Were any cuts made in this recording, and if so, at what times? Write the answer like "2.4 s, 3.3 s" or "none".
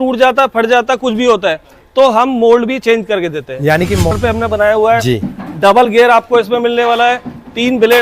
4.1 s